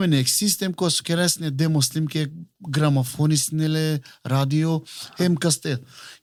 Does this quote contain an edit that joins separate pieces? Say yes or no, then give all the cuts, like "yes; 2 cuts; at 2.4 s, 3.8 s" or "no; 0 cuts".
no; 0 cuts